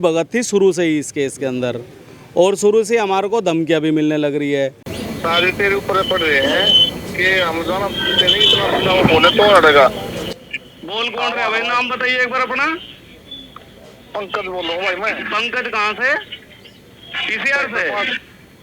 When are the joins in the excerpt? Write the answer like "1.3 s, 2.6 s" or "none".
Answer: 5.0 s

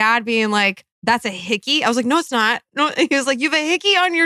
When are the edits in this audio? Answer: 0.9 s

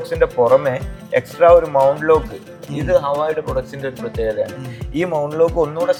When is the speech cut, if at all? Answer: none

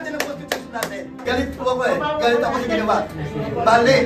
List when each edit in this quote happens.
1.1 s

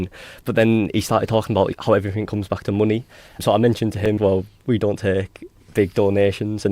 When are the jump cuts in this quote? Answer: 4.2 s

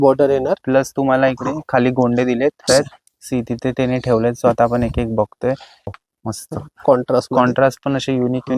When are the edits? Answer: 2.7 s, 5.9 s

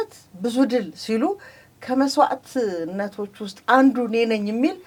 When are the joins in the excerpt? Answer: none

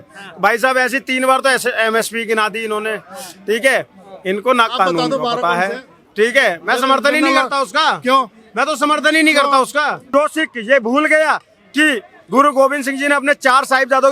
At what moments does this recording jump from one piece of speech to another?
10.0 s

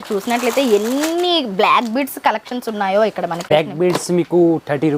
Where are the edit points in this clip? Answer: 3.5 s

